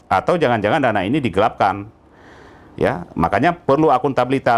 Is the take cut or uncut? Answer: uncut